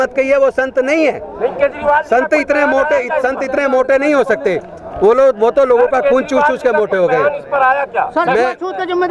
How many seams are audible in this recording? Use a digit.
0